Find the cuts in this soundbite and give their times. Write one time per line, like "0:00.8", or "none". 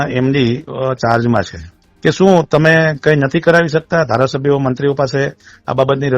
0:01.7